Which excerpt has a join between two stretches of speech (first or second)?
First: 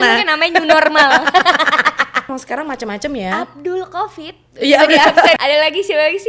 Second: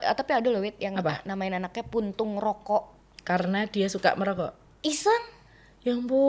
first